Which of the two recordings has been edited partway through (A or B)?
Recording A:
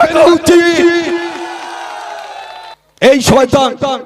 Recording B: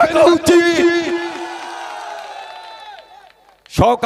A